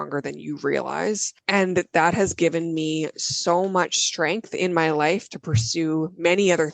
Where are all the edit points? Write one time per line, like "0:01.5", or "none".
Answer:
0:01.3